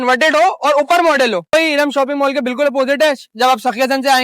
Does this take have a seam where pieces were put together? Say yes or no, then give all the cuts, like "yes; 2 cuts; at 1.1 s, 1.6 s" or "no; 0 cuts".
yes; 1 cut; at 1.5 s